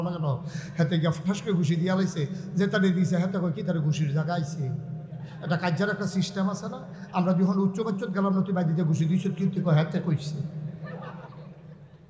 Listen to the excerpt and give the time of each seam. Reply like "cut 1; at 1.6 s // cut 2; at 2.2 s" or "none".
none